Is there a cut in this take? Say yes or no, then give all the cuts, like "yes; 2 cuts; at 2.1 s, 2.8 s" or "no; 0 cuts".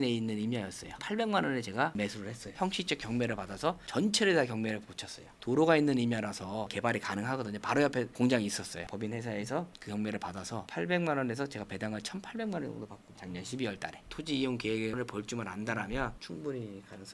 yes; 5 cuts; at 1.0 s, 2.5 s, 6.7 s, 14.0 s, 16.2 s